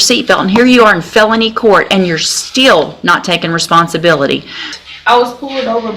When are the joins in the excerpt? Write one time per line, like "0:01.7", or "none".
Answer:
0:04.8